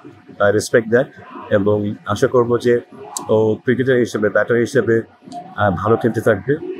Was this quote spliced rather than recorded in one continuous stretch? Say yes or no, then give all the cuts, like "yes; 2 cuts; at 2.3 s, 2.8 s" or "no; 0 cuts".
no; 0 cuts